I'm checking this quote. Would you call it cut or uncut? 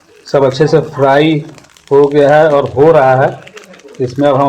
uncut